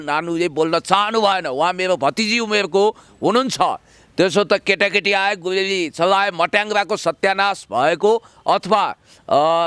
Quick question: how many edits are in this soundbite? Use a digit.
0